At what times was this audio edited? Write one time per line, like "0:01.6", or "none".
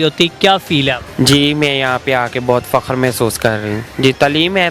0:01.0
0:03.9